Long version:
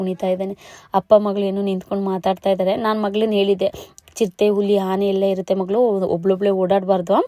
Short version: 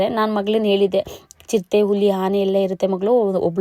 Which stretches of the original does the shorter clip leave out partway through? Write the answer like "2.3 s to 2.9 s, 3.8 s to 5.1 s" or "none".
none